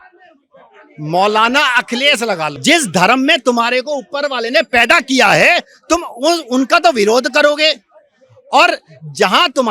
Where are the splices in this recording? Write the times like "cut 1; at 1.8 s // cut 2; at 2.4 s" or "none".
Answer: cut 1; at 2.5 s